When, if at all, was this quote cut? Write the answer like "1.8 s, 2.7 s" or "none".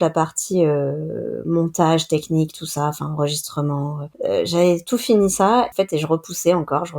4.0 s, 5.7 s